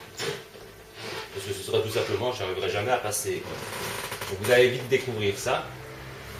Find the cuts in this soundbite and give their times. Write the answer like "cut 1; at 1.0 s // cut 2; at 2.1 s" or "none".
none